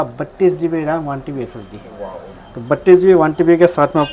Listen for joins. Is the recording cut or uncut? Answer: uncut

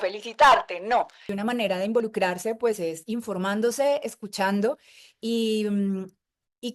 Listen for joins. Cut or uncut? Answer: cut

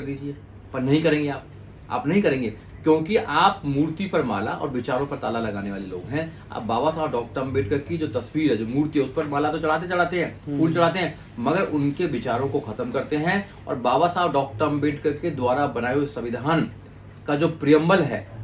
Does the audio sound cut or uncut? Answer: uncut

